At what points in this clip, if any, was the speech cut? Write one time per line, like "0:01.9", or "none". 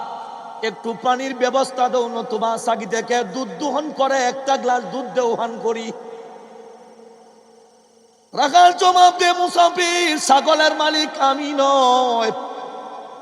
none